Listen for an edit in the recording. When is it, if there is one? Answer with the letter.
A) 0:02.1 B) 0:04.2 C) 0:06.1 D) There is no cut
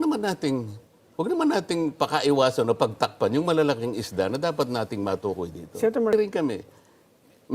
C